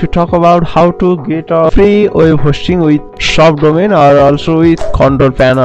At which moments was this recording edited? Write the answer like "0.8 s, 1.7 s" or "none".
1.7 s, 3.2 s, 4.8 s